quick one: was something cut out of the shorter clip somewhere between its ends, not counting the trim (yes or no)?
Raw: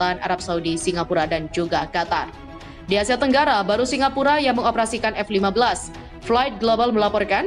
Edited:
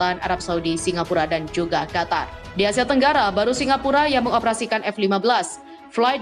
yes